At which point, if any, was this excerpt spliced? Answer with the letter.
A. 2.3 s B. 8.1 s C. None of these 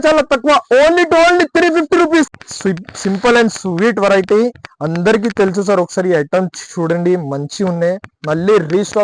A